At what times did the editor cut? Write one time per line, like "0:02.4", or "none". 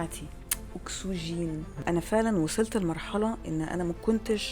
0:01.8